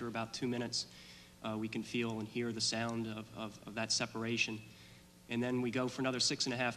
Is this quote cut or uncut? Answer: uncut